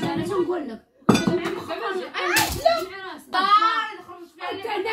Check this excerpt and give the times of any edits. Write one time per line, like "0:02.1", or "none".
0:03.3

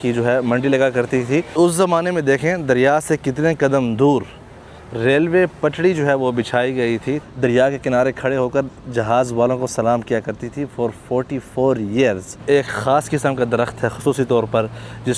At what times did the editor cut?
0:01.5
0:07.2
0:12.4

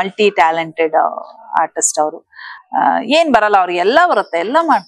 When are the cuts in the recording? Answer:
none

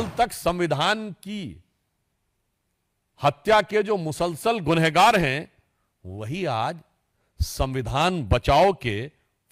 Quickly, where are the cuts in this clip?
none

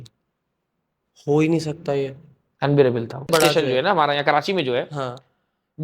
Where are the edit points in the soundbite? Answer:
0:03.3

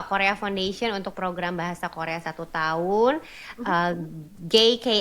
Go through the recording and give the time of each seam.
none

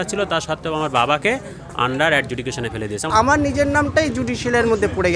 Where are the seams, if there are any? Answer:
0:03.1

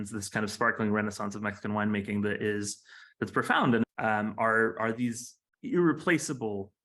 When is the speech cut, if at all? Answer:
0:03.8

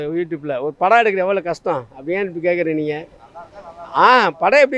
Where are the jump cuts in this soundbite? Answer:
none

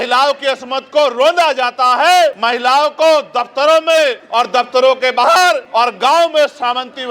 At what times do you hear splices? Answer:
0:02.4
0:05.6

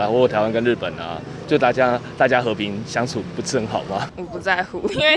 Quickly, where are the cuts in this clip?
0:04.1

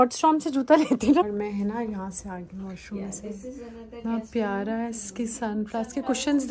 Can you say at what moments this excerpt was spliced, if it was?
0:01.3

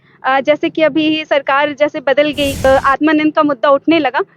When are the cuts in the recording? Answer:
0:02.6

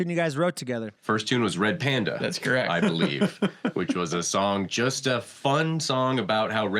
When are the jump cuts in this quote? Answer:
0:00.9

